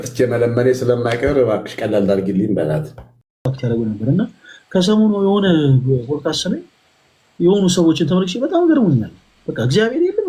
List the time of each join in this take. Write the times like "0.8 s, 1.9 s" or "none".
3.5 s